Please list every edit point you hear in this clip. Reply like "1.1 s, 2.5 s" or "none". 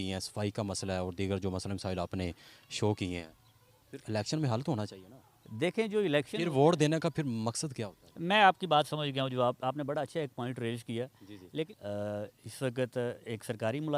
11.7 s